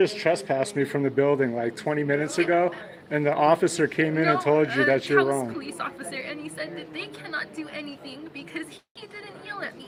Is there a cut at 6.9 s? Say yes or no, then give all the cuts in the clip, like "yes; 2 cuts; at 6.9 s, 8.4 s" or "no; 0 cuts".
no; 0 cuts